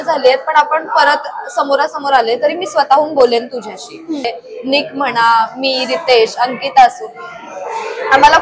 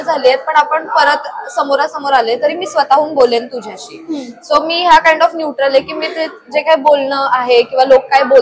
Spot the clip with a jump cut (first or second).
first